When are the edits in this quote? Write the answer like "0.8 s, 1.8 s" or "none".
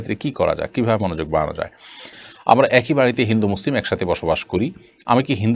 2.1 s